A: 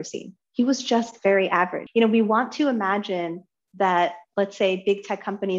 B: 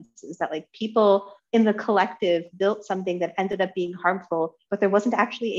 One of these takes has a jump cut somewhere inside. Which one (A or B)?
A